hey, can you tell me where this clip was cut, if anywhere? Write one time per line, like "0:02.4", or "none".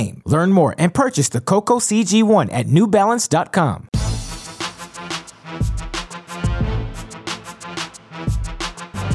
0:03.8